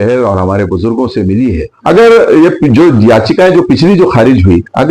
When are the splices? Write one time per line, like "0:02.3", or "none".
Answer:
0:01.7